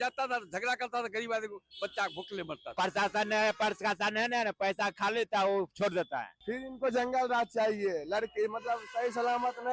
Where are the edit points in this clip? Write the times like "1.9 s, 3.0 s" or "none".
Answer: 2.6 s, 6.3 s